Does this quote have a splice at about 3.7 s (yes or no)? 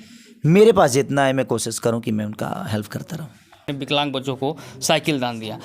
yes